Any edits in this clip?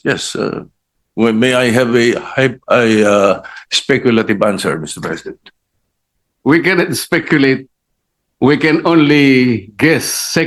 no; 0 cuts

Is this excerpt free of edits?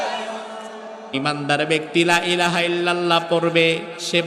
no; 1 cut; at 1.1 s

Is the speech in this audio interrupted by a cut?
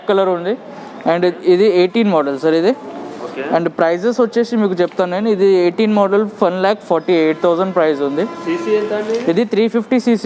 no; 0 cuts

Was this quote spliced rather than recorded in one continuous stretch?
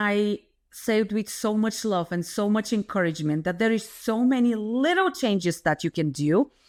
no; 0 cuts

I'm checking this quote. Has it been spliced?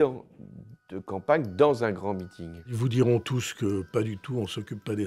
yes; 1 cut; at 2.7 s

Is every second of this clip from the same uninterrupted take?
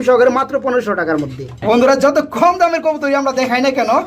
no; 1 cut; at 1.6 s

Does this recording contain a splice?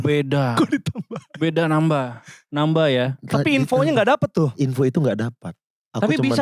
no; 0 cuts

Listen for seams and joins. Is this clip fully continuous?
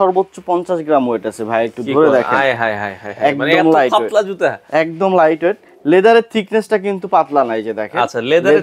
yes; 0 cuts

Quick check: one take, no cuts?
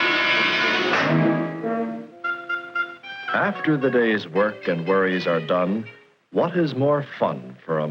no; 1 cut; at 6.9 s

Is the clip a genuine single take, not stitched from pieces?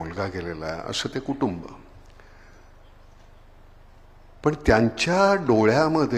yes; 0 cuts

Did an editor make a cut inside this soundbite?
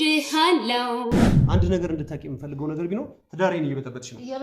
yes; 1 cut; at 1.3 s

